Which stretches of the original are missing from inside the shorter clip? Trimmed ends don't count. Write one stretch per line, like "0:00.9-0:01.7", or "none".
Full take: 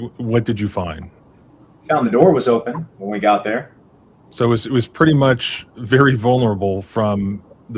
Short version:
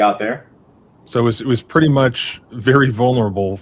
none